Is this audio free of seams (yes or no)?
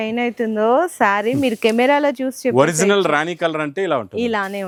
yes